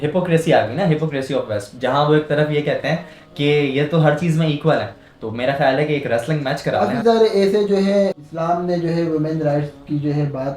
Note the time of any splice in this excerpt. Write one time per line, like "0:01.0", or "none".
0:06.8
0:08.1